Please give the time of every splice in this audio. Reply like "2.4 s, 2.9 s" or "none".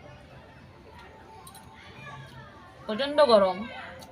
none